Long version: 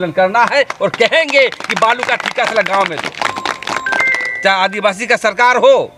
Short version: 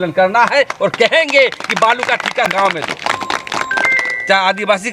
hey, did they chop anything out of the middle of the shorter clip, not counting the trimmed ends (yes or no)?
yes